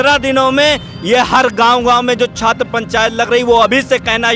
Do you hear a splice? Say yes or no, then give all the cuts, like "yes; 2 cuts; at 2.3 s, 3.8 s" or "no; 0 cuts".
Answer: no; 0 cuts